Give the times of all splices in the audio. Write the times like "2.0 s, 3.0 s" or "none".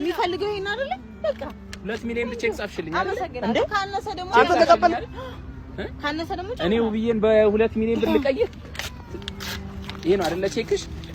none